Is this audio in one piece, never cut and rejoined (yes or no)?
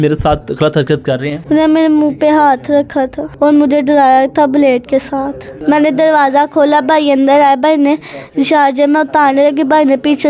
no